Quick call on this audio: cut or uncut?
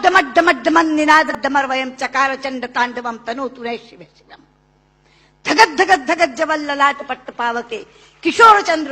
cut